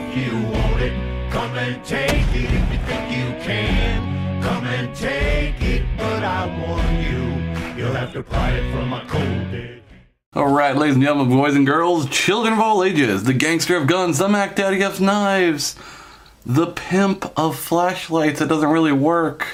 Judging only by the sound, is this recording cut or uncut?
uncut